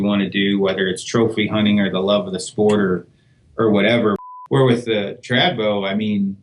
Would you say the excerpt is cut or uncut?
cut